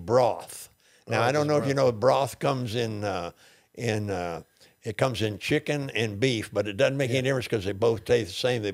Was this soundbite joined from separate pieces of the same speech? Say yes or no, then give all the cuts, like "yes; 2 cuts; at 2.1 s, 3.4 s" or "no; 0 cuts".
no; 0 cuts